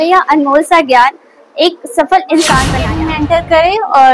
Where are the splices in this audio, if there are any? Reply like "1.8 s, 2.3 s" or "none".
2.8 s

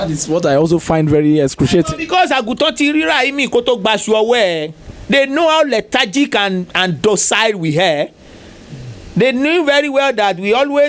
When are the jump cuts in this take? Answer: none

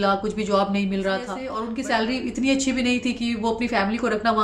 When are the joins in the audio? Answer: 1.6 s

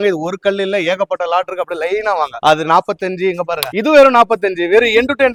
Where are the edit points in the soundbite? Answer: none

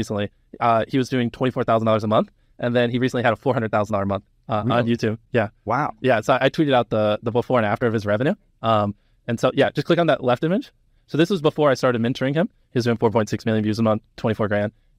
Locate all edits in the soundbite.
none

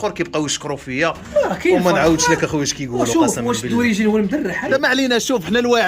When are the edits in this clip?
4.6 s

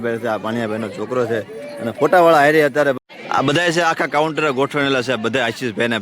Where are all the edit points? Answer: 3.0 s

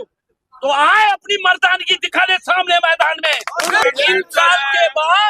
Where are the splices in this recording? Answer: 3.8 s

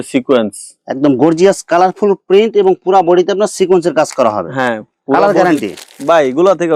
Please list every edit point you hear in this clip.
none

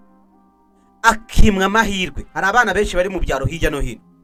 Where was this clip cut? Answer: none

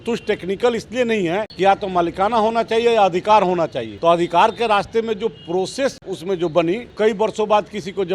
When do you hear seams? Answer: 1.5 s, 3.8 s, 6.1 s, 6.9 s

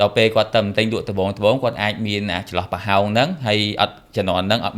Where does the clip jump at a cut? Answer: none

